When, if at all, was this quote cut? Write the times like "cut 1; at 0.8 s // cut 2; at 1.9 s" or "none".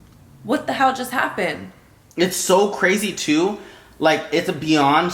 cut 1; at 1.9 s